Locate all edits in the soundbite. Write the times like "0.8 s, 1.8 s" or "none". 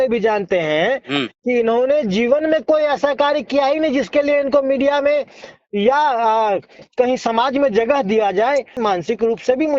8.8 s